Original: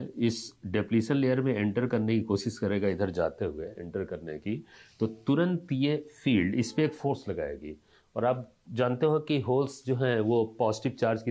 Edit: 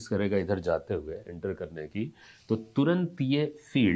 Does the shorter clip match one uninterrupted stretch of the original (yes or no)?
yes